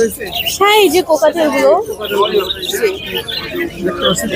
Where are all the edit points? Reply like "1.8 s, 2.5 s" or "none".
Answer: none